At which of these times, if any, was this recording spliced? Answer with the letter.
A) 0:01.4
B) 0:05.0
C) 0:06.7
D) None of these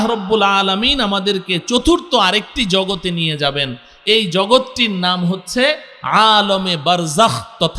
D